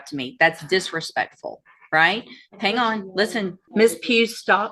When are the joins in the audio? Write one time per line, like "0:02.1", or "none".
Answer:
0:03.6